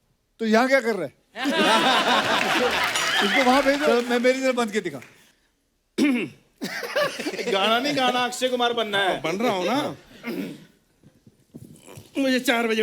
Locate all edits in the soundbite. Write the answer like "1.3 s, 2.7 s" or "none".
3.9 s